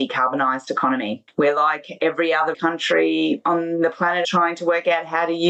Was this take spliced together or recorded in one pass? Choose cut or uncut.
cut